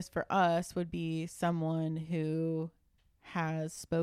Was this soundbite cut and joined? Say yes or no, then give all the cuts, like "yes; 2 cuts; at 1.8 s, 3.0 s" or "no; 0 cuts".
no; 0 cuts